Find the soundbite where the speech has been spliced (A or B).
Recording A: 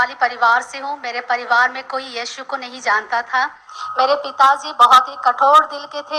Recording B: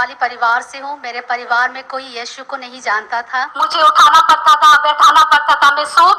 B